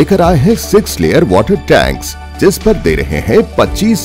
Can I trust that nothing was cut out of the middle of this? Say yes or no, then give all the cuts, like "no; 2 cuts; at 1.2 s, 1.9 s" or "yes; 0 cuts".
yes; 0 cuts